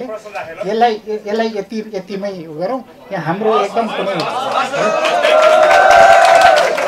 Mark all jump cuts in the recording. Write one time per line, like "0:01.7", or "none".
none